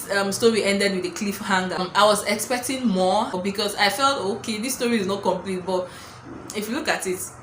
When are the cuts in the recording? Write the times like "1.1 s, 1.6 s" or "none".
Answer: 1.9 s, 3.4 s

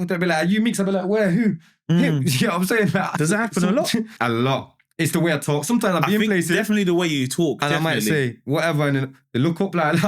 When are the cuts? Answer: 3.1 s, 4.1 s

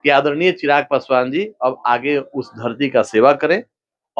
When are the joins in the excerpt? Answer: none

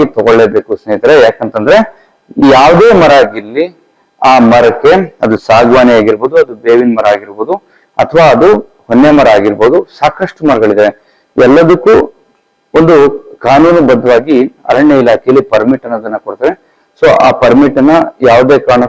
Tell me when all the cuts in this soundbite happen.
none

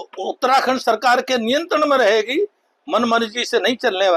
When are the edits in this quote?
none

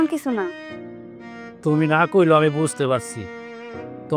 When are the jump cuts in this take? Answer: none

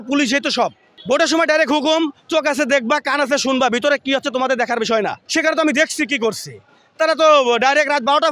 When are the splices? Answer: 1.0 s, 5.2 s

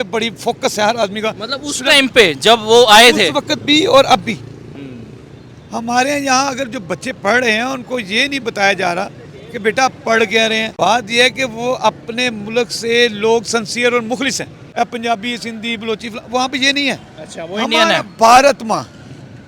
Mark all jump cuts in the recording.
10.7 s, 14.6 s

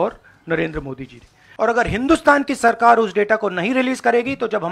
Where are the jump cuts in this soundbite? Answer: 1.4 s

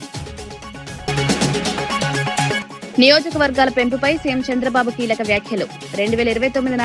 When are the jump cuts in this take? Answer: 0.9 s

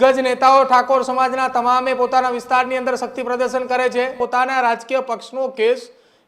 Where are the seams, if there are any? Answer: 4.2 s

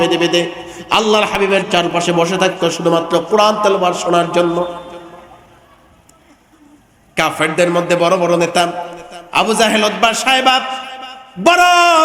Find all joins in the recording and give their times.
none

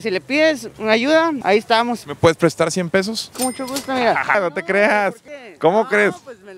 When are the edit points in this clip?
2.0 s, 4.3 s, 5.3 s

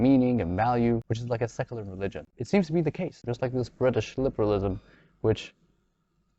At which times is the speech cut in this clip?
1.1 s, 2.3 s, 3.2 s

